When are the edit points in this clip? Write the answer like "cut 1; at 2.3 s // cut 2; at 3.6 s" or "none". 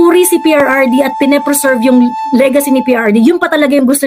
none